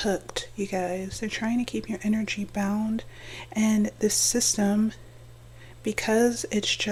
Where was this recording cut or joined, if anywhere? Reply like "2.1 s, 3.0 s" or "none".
none